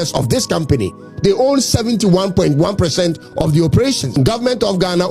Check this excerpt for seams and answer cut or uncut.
cut